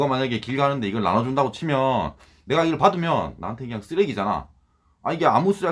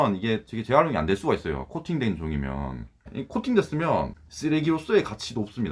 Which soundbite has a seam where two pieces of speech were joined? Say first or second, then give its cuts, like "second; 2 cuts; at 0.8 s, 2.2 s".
second; 2 cuts; at 3.1 s, 4.2 s